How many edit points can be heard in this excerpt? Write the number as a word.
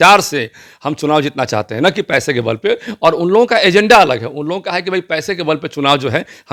zero